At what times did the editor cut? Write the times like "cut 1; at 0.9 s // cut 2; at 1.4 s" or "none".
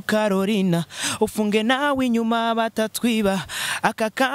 none